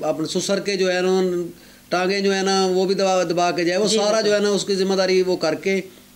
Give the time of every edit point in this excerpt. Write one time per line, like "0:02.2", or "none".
none